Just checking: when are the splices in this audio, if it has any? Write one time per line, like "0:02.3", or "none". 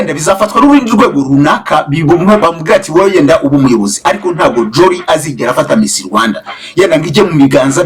none